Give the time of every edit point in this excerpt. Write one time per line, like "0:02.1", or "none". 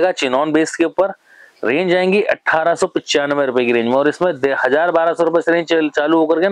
none